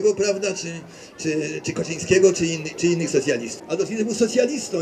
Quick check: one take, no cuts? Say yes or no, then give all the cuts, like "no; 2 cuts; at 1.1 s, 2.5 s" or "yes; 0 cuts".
no; 1 cut; at 3.5 s